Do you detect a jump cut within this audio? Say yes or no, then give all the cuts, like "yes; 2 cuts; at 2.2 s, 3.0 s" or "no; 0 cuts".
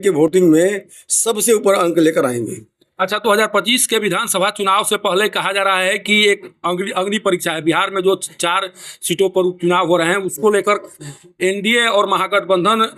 no; 0 cuts